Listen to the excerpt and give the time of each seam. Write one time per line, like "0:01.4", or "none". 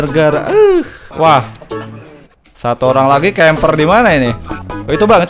none